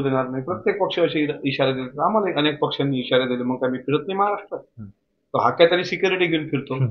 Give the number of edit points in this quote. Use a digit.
0